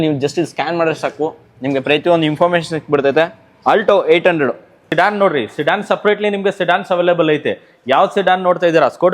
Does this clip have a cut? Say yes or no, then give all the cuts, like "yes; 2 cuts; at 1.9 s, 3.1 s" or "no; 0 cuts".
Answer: yes; 1 cut; at 4.9 s